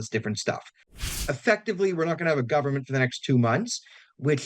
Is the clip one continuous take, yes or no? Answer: no